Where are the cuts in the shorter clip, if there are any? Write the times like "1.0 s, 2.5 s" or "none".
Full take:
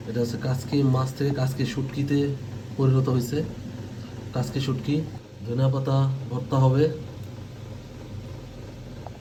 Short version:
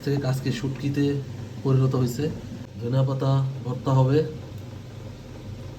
2.6 s